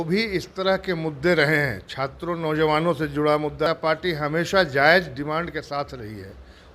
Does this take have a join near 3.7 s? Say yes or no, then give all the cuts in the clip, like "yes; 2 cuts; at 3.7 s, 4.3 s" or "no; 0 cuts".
yes; 1 cut; at 3.7 s